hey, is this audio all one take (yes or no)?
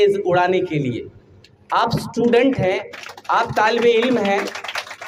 yes